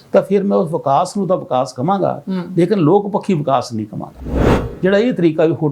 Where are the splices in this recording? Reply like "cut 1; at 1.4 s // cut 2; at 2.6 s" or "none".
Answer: cut 1; at 4.5 s